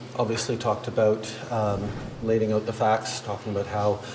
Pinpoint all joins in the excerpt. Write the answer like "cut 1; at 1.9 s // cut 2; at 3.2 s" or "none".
none